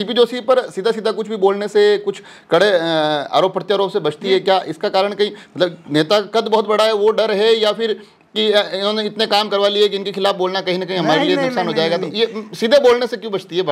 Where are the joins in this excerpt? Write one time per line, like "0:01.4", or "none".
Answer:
none